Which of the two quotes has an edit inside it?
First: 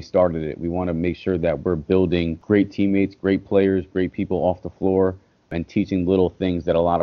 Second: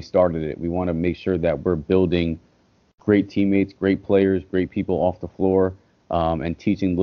first; 2 cuts; at 2.4 s, 5.5 s

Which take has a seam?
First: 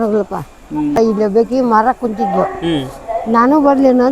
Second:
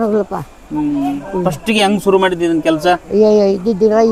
first; 1 cut; at 1.0 s

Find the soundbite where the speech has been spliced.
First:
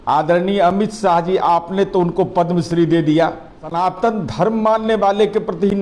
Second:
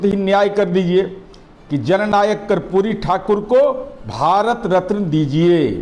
first; 1 cut; at 3.8 s

